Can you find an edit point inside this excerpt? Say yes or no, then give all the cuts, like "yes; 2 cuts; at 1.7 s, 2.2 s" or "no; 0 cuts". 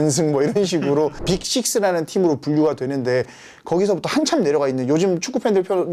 yes; 1 cut; at 1.2 s